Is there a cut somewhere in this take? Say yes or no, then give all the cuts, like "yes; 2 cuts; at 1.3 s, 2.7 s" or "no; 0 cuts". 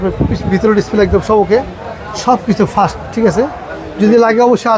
no; 0 cuts